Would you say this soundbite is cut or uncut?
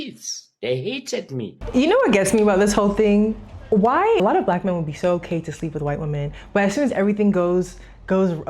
cut